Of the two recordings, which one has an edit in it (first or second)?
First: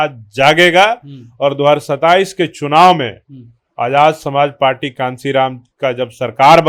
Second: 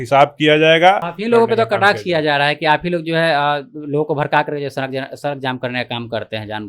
second